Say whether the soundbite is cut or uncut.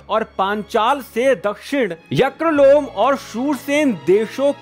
uncut